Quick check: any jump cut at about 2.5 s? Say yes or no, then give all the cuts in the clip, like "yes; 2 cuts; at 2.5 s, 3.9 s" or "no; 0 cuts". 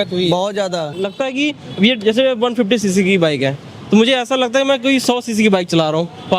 no; 1 cut; at 1.1 s